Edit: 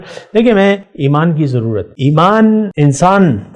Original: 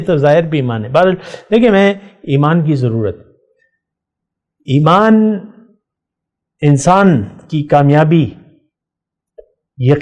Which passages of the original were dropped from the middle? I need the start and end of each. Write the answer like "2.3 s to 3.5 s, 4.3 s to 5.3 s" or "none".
2.1 s to 2.2 s, 3.2 s to 4.6 s, 5.4 s to 6.6 s